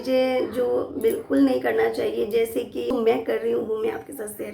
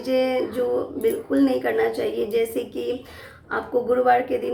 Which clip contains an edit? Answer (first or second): first